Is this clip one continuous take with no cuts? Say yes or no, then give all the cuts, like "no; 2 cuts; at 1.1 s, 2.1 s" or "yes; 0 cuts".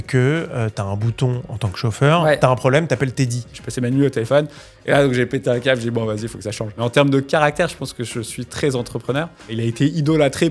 no; 3 cuts; at 3.5 s, 6.7 s, 9.5 s